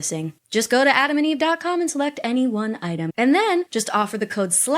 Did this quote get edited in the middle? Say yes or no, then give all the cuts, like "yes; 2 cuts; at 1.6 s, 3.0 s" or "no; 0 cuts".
yes; 2 cuts; at 3.1 s, 3.7 s